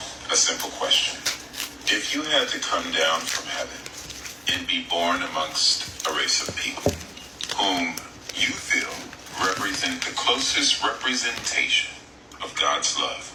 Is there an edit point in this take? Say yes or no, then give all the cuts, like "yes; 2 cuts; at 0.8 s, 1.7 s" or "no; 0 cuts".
no; 0 cuts